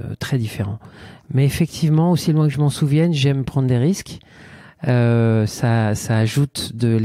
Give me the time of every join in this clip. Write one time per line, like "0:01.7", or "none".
none